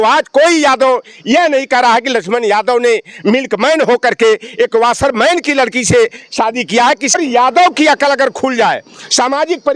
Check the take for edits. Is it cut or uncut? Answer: cut